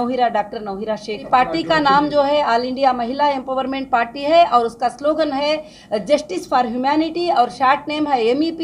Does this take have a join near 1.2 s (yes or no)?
yes